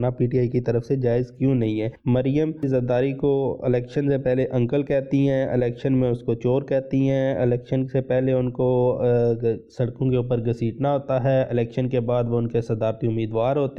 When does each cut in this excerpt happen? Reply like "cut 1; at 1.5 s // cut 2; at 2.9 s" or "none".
none

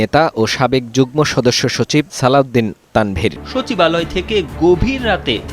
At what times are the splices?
cut 1; at 3.4 s

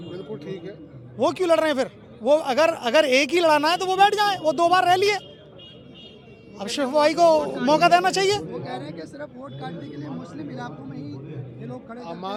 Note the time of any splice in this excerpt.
none

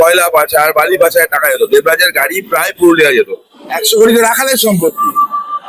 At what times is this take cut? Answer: cut 1; at 3.8 s

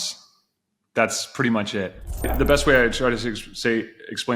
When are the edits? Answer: cut 1; at 2.3 s

